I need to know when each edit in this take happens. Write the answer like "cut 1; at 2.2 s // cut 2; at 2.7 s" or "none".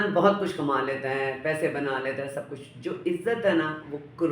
none

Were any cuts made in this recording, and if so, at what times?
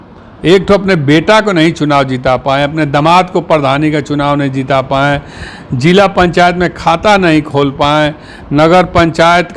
none

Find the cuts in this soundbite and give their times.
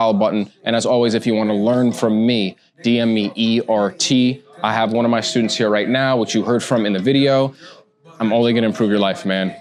none

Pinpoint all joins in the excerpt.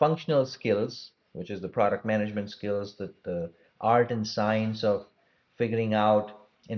none

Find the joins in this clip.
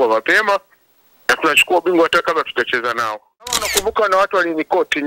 cut 1; at 3.7 s

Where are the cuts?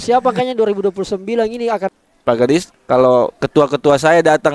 cut 1; at 2.0 s // cut 2; at 2.7 s

